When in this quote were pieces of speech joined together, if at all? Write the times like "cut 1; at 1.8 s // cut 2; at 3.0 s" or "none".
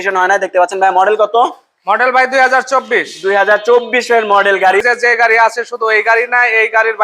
cut 1; at 4.8 s